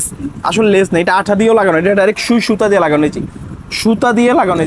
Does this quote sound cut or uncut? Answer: uncut